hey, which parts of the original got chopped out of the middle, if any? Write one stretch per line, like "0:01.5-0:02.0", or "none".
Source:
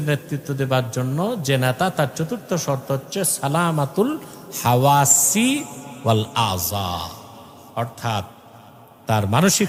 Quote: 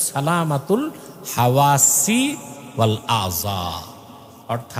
none